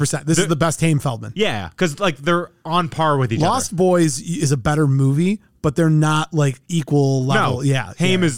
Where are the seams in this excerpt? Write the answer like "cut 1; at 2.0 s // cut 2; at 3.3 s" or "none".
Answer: none